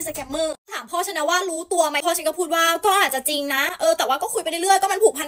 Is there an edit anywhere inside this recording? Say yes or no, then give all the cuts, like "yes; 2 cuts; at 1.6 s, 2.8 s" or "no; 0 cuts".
yes; 1 cut; at 2.0 s